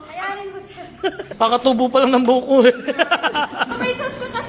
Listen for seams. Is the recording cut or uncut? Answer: cut